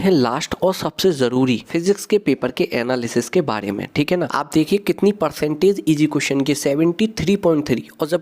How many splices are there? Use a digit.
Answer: 2